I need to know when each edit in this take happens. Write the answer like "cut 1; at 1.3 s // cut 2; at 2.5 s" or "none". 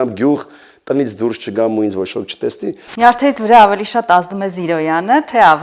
cut 1; at 2.8 s